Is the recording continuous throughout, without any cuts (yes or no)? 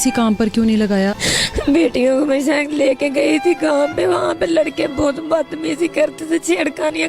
no